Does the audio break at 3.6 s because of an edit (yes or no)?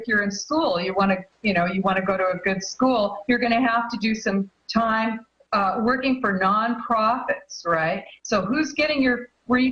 no